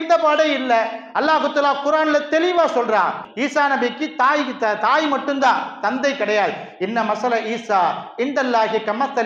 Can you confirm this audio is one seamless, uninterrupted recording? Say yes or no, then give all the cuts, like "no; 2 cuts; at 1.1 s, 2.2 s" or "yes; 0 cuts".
no; 1 cut; at 3.2 s